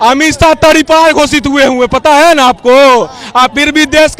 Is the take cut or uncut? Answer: uncut